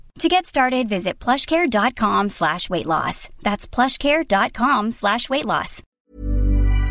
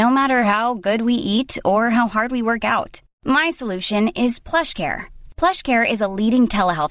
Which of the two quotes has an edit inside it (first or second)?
first